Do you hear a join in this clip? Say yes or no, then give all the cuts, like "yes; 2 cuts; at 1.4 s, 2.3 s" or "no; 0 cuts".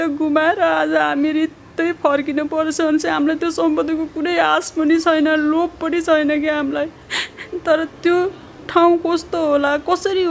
no; 0 cuts